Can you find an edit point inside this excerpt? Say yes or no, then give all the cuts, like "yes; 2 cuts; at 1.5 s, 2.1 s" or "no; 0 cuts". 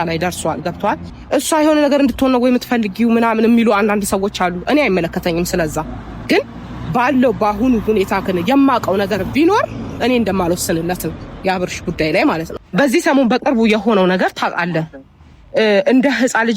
yes; 2 cuts; at 1.1 s, 12.5 s